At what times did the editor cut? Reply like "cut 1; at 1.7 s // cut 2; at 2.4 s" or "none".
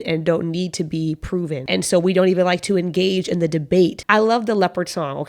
cut 1; at 1.6 s // cut 2; at 4.0 s